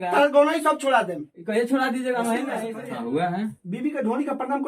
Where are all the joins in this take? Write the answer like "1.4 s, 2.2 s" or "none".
2.6 s